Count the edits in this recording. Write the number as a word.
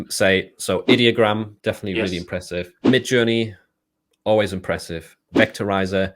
two